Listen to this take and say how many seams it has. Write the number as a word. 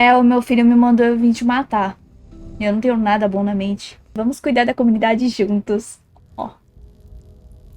one